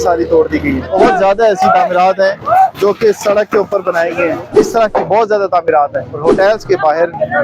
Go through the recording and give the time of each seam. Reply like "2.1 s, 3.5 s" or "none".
0.9 s, 4.5 s, 6.1 s